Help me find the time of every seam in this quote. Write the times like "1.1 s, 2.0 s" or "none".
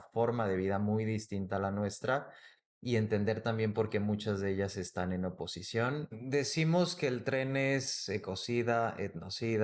6.2 s